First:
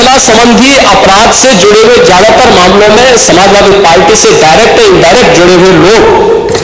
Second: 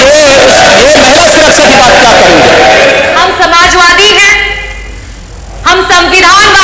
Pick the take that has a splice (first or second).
second